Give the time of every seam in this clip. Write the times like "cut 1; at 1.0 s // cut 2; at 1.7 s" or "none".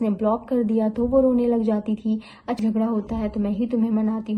cut 1; at 2.6 s